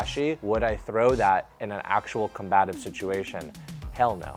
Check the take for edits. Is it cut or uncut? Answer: uncut